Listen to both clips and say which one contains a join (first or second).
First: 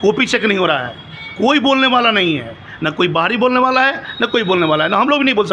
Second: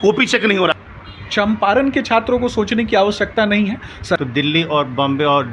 second